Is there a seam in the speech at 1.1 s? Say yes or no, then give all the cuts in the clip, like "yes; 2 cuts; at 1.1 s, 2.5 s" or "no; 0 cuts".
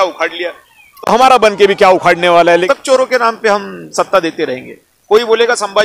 no; 1 cut; at 2.6 s